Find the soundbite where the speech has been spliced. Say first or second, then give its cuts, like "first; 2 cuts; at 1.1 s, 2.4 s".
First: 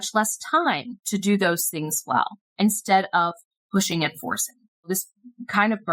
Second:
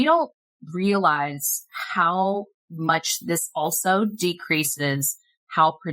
first; 3 cuts; at 0.9 s, 2.4 s, 4.9 s